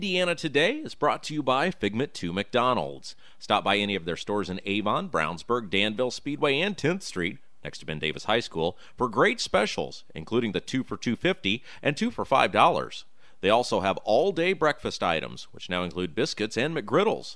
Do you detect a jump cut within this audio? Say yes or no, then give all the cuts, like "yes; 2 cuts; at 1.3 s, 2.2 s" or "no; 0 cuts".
no; 0 cuts